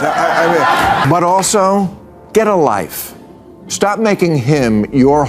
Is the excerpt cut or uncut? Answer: cut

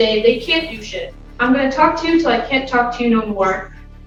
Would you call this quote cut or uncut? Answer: uncut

